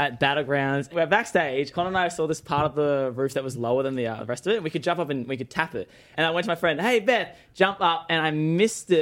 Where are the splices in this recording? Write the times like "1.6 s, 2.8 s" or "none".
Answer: 0.9 s, 1.7 s, 6.1 s